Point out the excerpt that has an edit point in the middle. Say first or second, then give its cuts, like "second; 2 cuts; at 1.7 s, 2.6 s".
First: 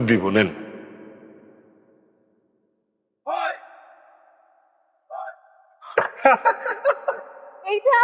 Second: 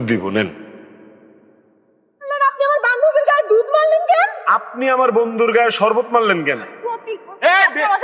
second; 2 cuts; at 2.3 s, 6.9 s